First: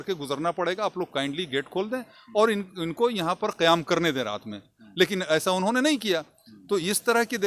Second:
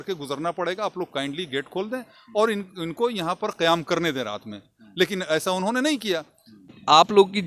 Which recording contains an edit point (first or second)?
second